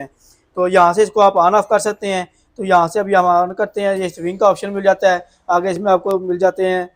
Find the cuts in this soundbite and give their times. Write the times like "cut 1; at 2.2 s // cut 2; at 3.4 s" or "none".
none